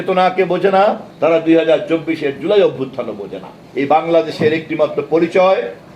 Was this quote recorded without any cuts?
no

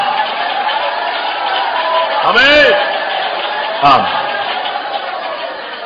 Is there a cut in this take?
no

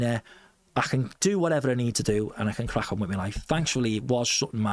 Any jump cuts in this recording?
no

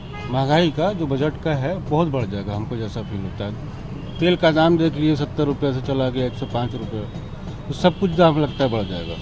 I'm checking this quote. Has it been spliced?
no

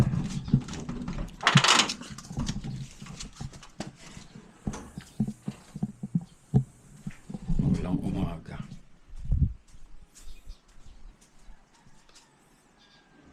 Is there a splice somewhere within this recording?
no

